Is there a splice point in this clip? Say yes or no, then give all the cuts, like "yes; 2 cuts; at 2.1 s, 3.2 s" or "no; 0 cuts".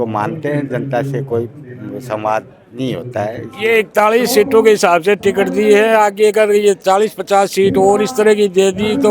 yes; 1 cut; at 3.5 s